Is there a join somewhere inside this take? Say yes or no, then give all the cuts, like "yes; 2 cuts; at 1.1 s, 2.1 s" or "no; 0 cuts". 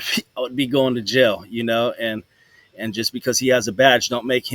no; 0 cuts